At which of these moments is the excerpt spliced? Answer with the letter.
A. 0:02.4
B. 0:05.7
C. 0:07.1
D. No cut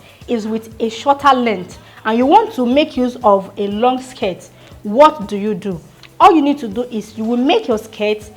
D